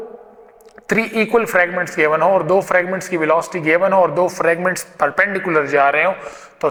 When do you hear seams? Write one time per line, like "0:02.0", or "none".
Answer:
none